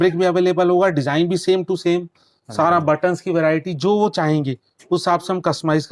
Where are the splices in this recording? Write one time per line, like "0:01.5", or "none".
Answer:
none